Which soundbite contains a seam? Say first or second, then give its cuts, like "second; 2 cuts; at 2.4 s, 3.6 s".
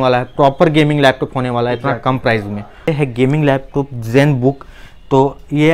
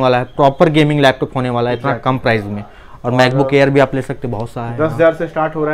first; 1 cut; at 2.9 s